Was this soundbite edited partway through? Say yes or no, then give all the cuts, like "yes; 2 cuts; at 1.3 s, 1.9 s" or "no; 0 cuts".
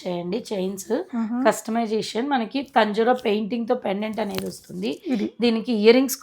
no; 0 cuts